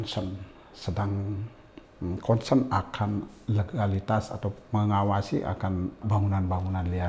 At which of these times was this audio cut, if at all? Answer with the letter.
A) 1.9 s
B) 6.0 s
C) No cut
B